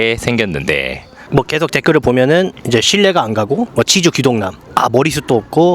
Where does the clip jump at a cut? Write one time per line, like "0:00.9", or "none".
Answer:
0:01.2
0:03.7
0:04.6